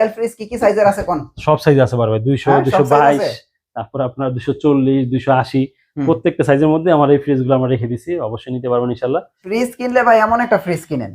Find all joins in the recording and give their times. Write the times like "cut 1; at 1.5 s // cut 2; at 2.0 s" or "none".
cut 1; at 9.4 s